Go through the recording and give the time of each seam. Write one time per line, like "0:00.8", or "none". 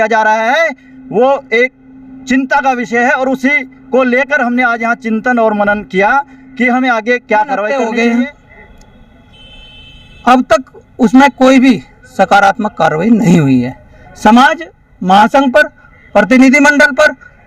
0:07.7